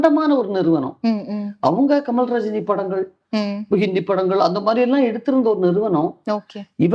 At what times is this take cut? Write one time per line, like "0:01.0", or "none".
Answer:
none